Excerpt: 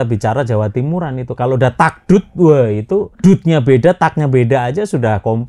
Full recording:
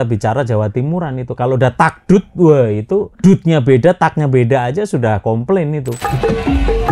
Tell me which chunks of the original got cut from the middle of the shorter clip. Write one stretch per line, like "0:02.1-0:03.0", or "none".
none

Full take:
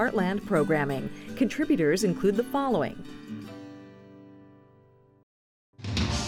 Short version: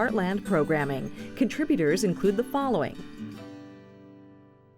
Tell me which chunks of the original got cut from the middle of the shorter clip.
0:03.0-0:03.1

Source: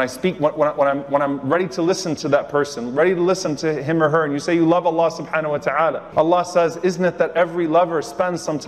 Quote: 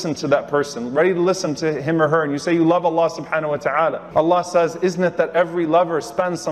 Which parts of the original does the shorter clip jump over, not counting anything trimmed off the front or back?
none

